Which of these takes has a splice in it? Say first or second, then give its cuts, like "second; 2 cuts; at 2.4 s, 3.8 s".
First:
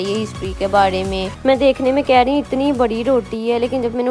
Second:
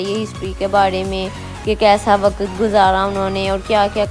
first; 1 cut; at 1.3 s